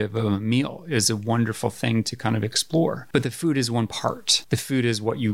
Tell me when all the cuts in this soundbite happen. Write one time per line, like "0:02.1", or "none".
0:03.0
0:04.3

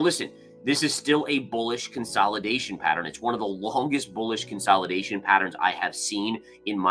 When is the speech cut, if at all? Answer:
none

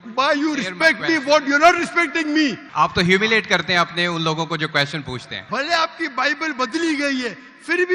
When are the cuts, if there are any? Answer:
0:02.6
0:05.3

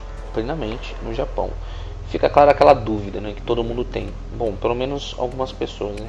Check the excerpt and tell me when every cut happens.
0:03.4

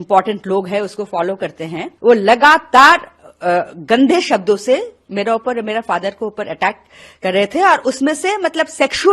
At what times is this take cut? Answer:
0:01.8

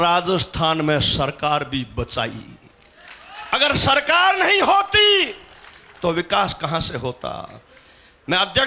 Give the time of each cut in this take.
none

